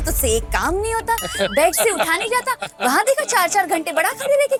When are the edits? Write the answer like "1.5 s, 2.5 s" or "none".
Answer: none